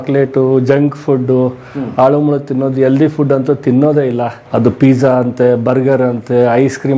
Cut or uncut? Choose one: uncut